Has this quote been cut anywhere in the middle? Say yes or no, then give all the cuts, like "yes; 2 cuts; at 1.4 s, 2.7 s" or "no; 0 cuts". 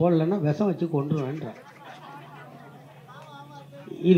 no; 0 cuts